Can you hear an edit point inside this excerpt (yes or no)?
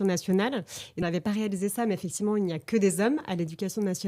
yes